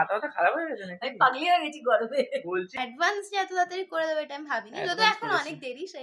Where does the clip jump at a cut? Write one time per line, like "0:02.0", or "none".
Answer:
0:02.7